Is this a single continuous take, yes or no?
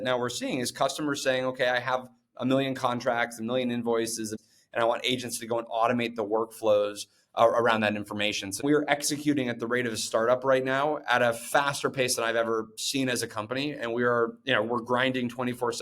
no